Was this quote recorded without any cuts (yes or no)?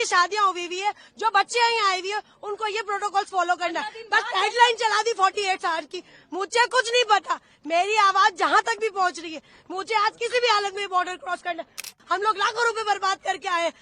no